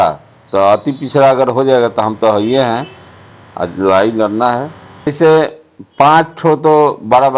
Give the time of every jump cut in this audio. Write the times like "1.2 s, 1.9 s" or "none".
5.1 s